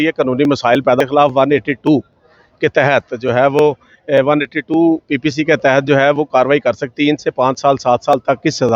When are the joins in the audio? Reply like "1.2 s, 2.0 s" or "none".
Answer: 1.0 s, 6.9 s